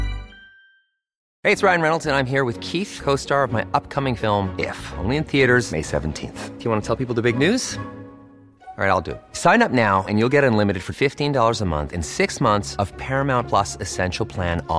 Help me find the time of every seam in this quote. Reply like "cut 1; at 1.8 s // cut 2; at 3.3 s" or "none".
cut 1; at 1.2 s